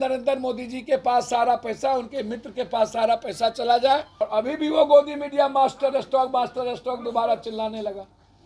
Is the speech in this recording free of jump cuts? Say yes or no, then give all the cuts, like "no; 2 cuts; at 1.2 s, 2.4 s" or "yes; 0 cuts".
no; 1 cut; at 4.1 s